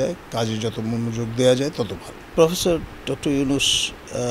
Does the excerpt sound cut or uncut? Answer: cut